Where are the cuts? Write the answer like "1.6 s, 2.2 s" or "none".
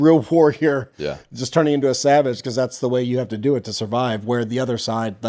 none